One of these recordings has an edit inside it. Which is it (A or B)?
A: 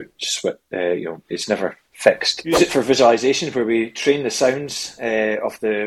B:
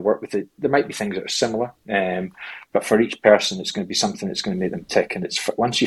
A